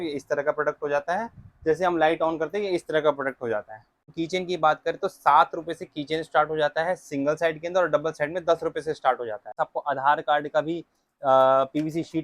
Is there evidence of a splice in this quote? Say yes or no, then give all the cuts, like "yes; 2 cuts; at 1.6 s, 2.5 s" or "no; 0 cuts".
yes; 2 cuts; at 4.1 s, 9.5 s